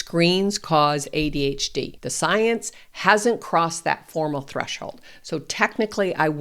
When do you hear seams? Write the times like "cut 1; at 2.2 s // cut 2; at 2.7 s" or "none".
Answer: cut 1; at 2.0 s